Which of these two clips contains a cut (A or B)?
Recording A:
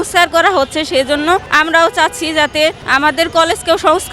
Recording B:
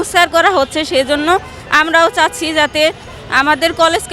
A